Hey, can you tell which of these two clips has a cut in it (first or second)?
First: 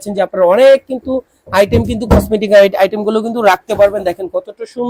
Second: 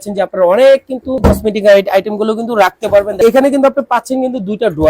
second